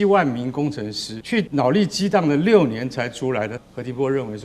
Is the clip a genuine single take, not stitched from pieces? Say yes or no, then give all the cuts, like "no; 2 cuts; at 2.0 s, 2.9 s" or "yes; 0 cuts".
no; 2 cuts; at 1.3 s, 3.5 s